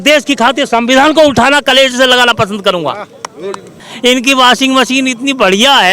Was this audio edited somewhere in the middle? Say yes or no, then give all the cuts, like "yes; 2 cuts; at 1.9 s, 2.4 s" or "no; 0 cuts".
yes; 1 cut; at 3.8 s